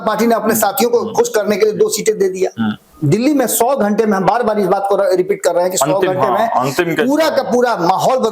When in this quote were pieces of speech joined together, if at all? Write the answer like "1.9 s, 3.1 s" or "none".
2.9 s